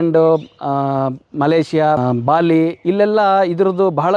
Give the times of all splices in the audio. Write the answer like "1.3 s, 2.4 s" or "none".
2.0 s